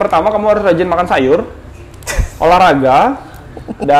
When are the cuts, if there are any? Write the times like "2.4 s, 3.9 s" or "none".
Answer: none